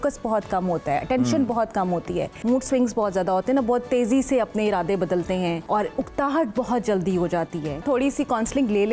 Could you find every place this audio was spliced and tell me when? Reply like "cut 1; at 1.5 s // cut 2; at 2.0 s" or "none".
cut 1; at 2.3 s // cut 2; at 5.6 s // cut 3; at 7.8 s